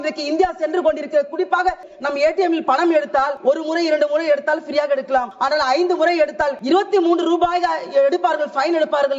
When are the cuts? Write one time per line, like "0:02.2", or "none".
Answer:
0:01.9
0:03.3
0:05.3
0:06.6